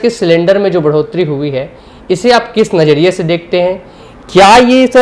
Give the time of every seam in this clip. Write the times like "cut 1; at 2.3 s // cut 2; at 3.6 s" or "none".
none